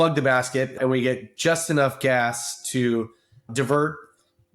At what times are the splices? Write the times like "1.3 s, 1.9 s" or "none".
0.7 s, 3.5 s